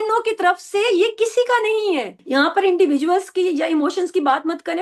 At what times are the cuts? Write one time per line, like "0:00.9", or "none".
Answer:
0:02.1